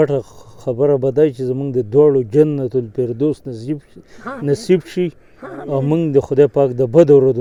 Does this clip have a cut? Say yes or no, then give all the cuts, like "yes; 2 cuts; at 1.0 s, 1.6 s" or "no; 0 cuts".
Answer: no; 0 cuts